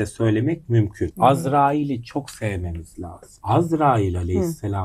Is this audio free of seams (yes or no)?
no